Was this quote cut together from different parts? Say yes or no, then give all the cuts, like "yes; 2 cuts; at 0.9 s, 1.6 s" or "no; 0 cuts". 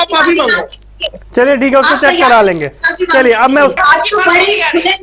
yes; 1 cut; at 3.7 s